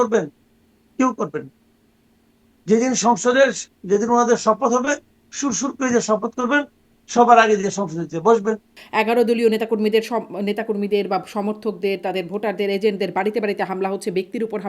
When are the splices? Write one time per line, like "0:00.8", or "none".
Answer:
0:08.8